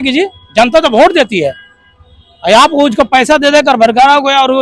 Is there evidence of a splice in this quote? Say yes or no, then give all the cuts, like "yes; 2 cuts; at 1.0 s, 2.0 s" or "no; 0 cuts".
no; 0 cuts